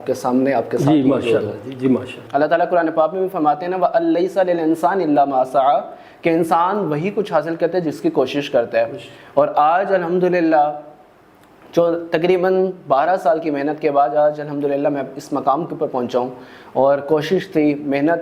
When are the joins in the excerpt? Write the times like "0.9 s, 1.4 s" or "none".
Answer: 2.2 s